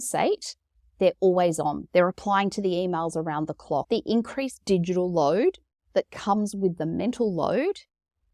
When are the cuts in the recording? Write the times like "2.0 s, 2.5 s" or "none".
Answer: 3.8 s